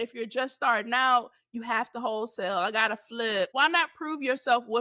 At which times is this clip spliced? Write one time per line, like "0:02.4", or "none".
0:03.5